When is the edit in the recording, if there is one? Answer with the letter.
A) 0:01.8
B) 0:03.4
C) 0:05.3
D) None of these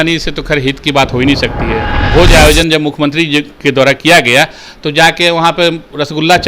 A